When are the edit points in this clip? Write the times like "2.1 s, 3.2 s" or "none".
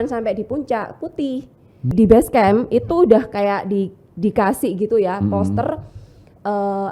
1.9 s